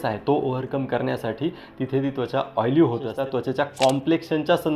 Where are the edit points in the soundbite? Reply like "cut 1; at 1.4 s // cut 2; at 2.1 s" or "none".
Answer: cut 1; at 3.1 s